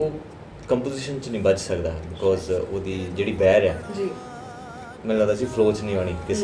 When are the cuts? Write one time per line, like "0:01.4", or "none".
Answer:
none